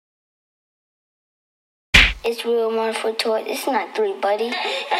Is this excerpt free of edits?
yes; 0 cuts

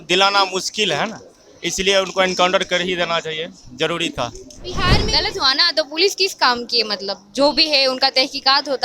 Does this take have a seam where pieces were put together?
yes; 1 cut; at 4.9 s

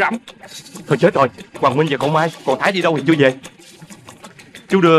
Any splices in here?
no; 0 cuts

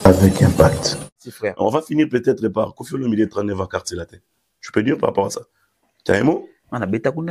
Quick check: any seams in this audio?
yes; 1 cut; at 1.1 s

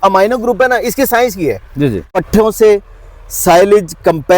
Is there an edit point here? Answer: yes; 1 cut; at 2.2 s

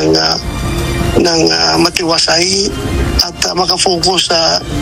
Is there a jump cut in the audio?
no; 0 cuts

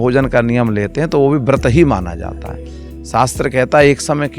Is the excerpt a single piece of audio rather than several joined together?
yes; 0 cuts

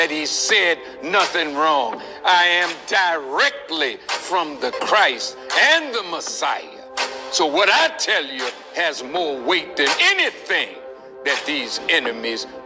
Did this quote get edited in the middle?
no; 0 cuts

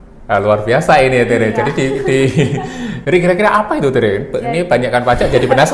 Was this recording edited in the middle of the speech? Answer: yes; 1 cut; at 2.9 s

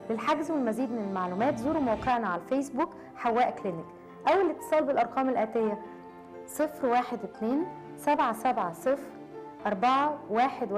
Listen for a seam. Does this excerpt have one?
no; 0 cuts

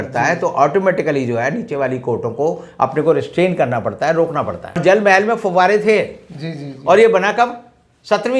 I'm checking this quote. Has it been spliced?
yes; 1 cut; at 4.8 s

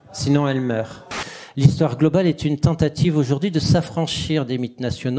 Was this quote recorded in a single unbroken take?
no; 1 cut; at 1.1 s

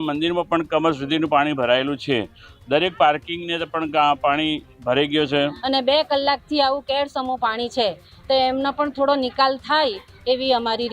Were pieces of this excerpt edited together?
yes; 1 cut; at 5.6 s

